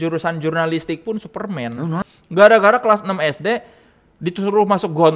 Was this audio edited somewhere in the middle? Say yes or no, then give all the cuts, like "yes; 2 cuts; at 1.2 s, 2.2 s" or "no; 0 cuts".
yes; 1 cut; at 2.0 s